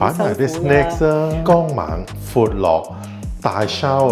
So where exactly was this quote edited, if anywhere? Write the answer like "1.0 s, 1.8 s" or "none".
1.4 s